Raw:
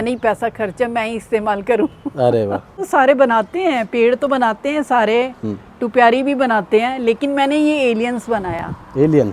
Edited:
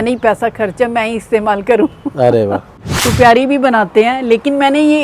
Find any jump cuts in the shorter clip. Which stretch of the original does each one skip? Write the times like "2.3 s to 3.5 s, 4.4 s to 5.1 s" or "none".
2.7 s to 5.5 s